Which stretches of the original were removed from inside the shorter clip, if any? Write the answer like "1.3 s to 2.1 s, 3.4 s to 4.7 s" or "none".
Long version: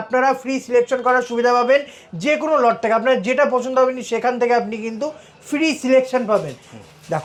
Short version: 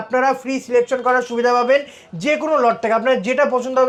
none